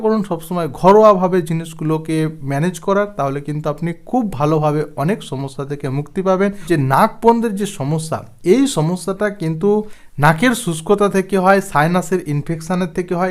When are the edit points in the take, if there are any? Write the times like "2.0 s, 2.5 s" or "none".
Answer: 6.7 s